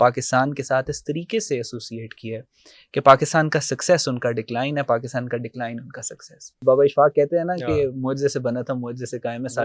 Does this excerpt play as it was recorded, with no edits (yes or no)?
no